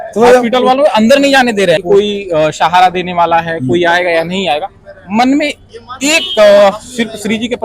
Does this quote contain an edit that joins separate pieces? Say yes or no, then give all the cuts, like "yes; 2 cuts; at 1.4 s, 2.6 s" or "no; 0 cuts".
yes; 1 cut; at 1.8 s